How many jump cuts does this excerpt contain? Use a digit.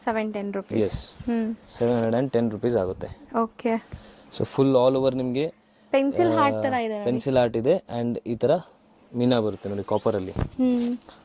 0